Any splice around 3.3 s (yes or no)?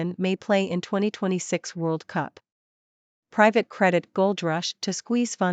yes